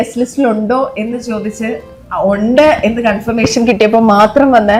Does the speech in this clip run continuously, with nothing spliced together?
yes; 0 cuts

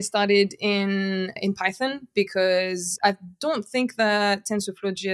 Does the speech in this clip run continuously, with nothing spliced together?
no; 2 cuts; at 1.4 s, 2.9 s

